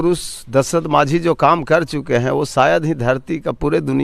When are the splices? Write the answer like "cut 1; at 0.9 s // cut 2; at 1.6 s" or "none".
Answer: none